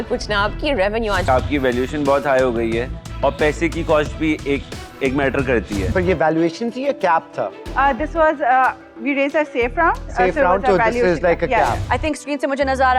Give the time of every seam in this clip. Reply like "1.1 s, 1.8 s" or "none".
1.3 s, 5.9 s, 11.8 s